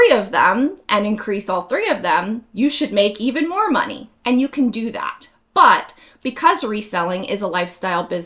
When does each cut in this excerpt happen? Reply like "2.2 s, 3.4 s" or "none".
none